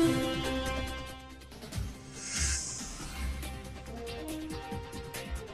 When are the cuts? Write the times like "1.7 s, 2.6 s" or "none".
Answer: 3.2 s

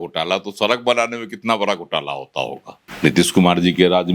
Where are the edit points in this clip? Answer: 2.8 s

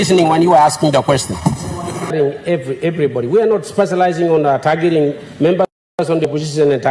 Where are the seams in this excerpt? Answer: 2.1 s

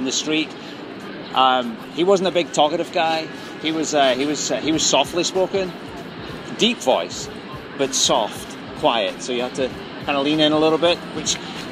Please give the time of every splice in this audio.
none

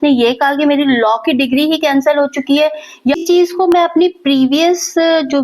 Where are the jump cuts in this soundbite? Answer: 3.2 s

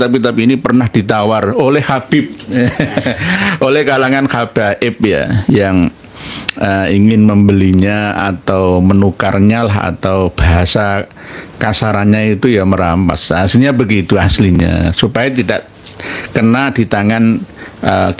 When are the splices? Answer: none

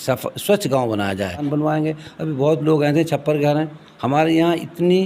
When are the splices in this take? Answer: 1.5 s

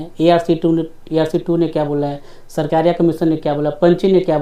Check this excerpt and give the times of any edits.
none

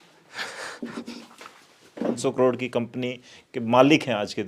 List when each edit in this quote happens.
2.2 s

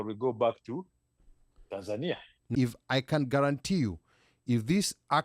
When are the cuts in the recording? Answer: 2.4 s

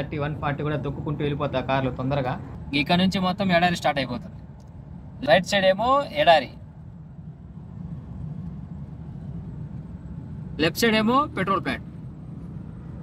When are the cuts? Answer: 2.5 s, 5.1 s

